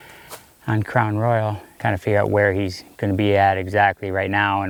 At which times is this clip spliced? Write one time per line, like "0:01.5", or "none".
none